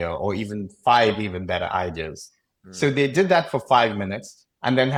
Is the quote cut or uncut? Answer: uncut